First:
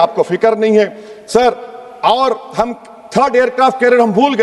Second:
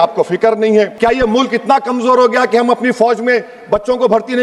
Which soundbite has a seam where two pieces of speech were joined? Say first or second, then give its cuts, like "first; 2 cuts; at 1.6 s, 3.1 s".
second; 1 cut; at 0.9 s